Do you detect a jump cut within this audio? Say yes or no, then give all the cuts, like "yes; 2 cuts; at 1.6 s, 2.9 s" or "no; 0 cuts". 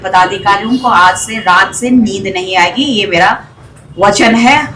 no; 0 cuts